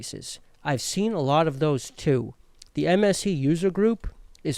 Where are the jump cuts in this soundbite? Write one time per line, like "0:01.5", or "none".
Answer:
none